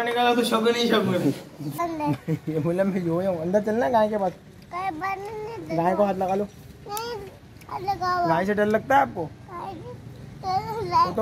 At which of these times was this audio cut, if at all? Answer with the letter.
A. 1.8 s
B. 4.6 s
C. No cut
A